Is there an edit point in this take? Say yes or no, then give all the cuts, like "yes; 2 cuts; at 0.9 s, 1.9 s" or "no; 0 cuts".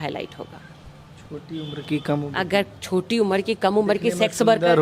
no; 0 cuts